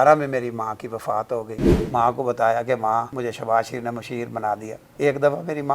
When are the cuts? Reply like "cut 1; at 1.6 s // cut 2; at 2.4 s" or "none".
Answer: cut 1; at 1.7 s // cut 2; at 3.1 s // cut 3; at 4.8 s